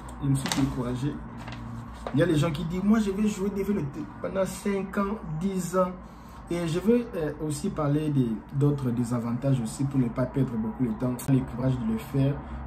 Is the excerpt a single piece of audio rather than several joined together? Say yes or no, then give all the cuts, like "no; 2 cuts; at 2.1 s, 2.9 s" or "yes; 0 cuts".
no; 1 cut; at 11.3 s